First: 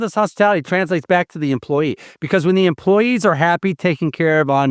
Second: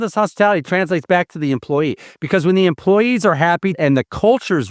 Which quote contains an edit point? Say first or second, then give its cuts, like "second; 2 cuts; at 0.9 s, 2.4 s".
second; 1 cut; at 3.8 s